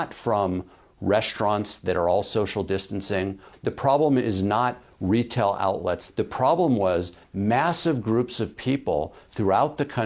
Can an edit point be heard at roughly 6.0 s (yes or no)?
yes